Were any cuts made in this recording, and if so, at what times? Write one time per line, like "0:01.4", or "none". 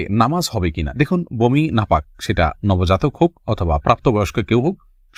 none